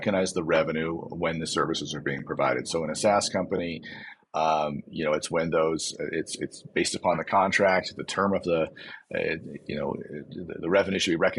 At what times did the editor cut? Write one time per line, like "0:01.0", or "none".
none